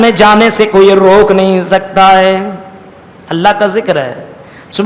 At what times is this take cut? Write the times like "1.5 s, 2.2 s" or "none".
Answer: none